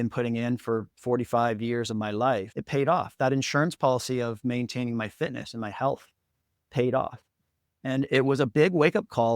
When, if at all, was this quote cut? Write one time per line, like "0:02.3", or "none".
0:00.9